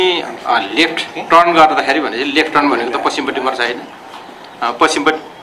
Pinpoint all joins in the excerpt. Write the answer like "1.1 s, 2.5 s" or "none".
none